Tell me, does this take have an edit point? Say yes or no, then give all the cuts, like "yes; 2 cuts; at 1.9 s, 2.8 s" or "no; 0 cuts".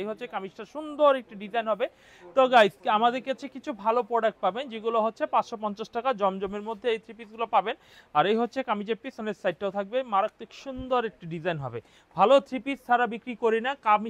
no; 0 cuts